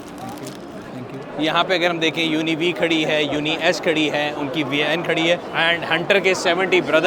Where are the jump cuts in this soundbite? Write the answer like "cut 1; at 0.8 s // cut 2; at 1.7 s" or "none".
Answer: cut 1; at 1.3 s // cut 2; at 5.5 s